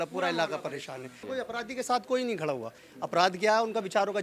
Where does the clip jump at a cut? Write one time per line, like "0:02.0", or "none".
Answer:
0:01.2